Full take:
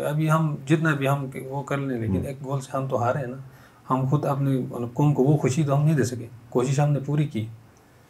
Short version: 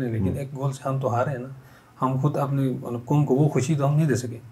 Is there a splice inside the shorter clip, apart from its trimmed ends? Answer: no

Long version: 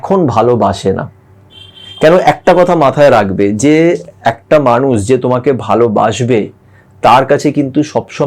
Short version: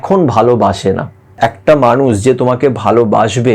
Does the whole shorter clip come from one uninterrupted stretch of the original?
no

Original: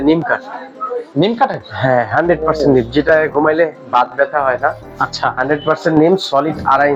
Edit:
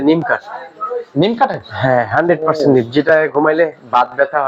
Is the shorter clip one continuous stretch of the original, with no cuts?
yes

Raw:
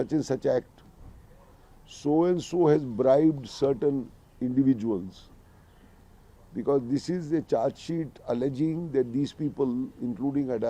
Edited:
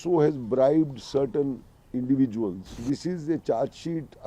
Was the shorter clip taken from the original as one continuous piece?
no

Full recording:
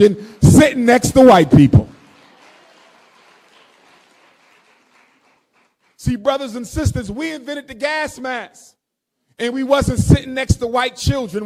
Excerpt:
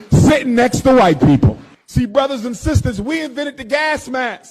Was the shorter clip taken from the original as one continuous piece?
no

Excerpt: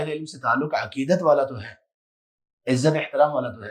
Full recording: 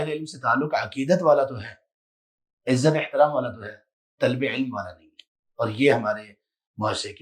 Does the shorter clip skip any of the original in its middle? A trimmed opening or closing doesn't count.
no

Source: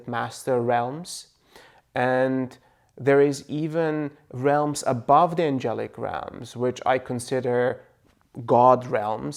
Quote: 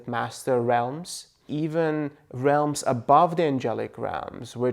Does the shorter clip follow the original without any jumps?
no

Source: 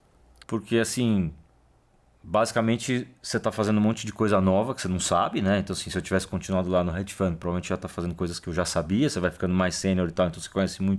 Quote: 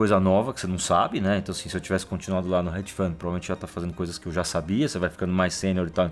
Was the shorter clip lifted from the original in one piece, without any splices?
yes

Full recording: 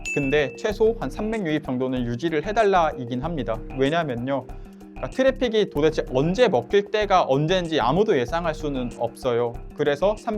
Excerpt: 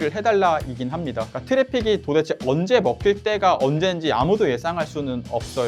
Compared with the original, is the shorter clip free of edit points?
no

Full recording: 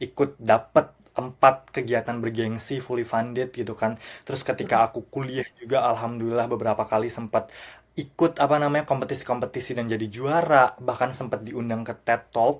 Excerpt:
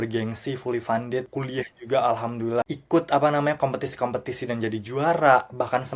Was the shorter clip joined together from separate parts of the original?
yes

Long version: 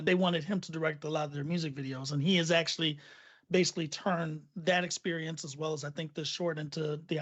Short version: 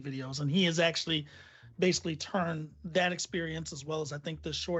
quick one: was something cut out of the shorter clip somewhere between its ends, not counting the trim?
no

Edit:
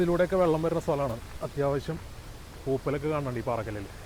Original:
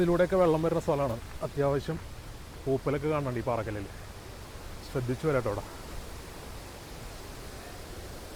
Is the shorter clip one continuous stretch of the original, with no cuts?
yes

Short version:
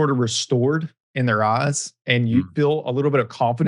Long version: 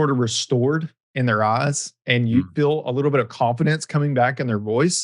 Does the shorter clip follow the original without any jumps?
yes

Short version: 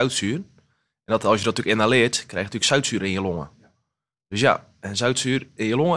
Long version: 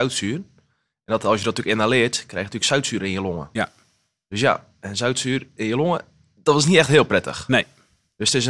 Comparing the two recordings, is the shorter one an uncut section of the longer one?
yes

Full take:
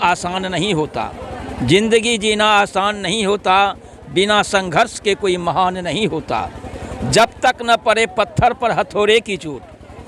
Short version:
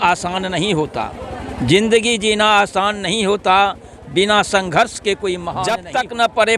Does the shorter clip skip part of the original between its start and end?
yes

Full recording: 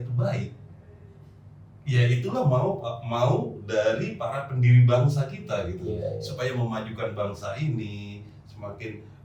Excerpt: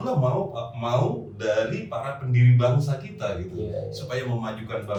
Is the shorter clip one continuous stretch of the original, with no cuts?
yes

